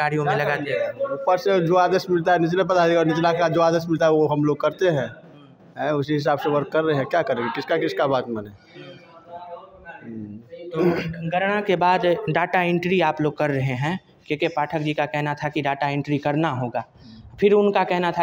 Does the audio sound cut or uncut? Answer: uncut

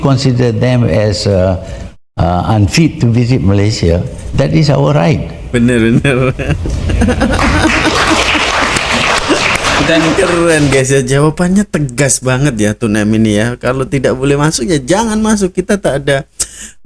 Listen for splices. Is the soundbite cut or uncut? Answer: uncut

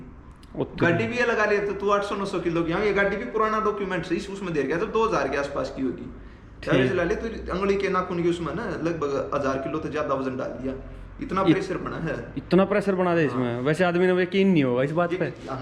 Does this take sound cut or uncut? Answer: uncut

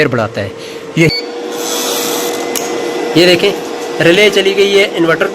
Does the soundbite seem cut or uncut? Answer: cut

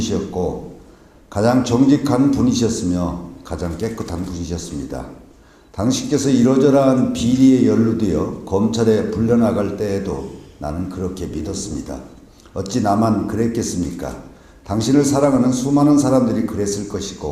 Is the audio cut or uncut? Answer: cut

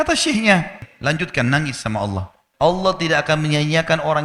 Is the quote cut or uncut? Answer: cut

